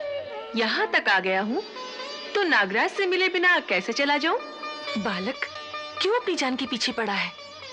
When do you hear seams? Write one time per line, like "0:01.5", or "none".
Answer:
none